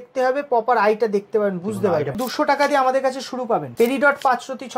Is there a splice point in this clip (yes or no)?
yes